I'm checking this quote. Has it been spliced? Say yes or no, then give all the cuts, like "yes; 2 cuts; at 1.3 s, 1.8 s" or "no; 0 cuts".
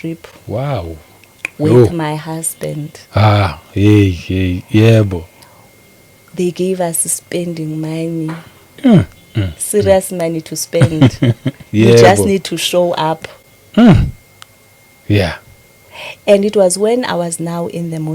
no; 0 cuts